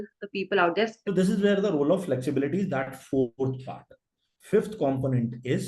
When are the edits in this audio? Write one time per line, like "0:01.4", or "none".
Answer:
0:01.0